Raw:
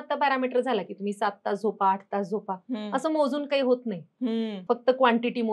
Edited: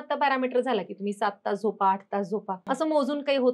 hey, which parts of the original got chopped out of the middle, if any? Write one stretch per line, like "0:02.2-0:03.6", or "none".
0:02.6-0:02.9